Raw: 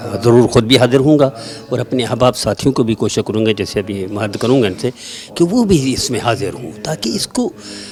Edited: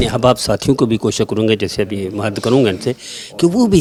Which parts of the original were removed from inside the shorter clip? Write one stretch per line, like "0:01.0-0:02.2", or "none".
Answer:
none